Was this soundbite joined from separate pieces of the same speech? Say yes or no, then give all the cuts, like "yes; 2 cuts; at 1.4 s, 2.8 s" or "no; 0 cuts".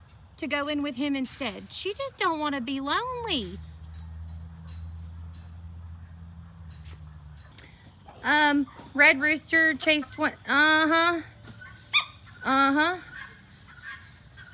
yes; 1 cut; at 7.6 s